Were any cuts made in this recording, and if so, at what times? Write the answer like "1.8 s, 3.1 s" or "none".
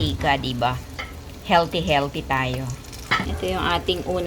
3.3 s

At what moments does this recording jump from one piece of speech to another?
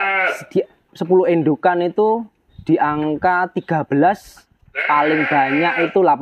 none

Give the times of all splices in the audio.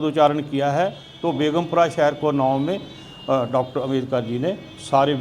1.1 s

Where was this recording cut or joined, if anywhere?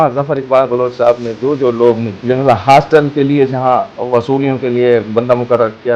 2.2 s, 3.9 s

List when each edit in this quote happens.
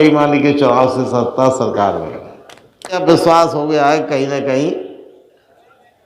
3.0 s

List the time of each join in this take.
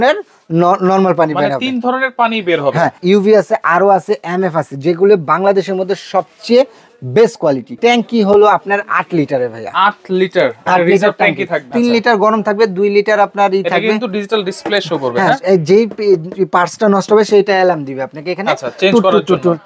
3.0 s, 7.7 s, 11.6 s

